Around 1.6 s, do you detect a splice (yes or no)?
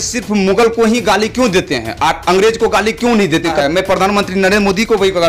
no